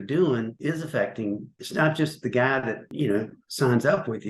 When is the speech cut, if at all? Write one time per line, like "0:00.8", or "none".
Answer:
none